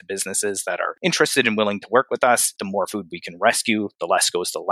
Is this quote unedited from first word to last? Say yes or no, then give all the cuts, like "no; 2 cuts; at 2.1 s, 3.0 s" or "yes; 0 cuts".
no; 2 cuts; at 0.9 s, 2.6 s